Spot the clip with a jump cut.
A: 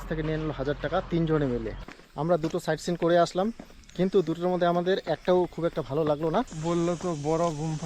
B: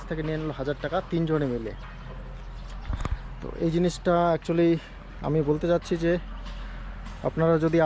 A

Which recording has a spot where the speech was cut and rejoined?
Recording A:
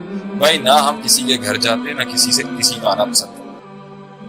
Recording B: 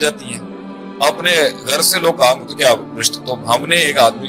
A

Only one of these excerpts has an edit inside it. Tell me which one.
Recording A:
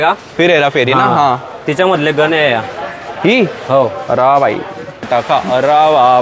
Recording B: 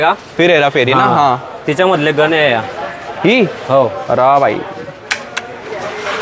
A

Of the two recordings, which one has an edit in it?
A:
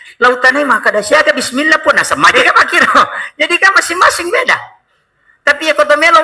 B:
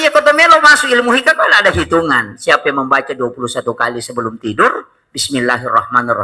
A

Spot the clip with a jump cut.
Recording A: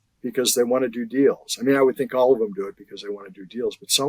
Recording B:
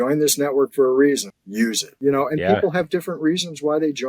B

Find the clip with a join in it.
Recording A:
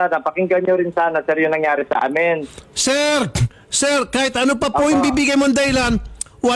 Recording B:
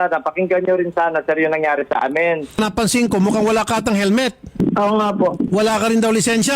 B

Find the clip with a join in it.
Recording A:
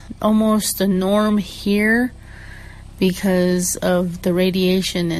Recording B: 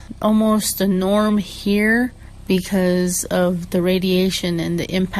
B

